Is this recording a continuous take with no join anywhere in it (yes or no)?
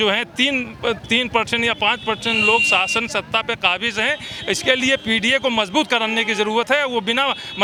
yes